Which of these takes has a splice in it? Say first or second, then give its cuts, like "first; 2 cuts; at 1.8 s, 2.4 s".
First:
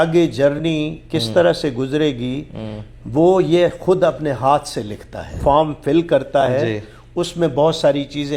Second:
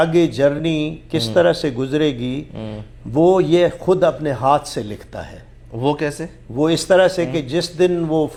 first; 1 cut; at 5.4 s